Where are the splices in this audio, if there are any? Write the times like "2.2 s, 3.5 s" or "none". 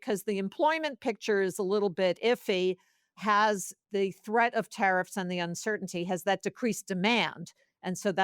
3.7 s